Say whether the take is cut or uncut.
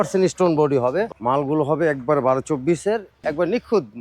cut